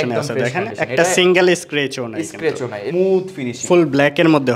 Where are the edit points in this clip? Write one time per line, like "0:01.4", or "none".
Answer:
0:02.8